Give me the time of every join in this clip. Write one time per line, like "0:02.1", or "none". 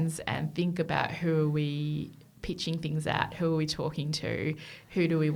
none